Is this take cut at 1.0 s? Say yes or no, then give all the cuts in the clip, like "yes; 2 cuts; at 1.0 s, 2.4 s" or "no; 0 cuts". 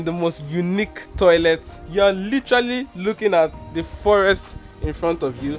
yes; 2 cuts; at 1.0 s, 1.8 s